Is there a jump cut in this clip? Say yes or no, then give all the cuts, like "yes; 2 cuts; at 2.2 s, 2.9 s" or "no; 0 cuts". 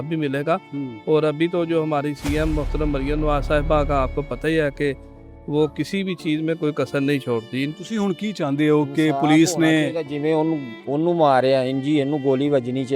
yes; 1 cut; at 7.7 s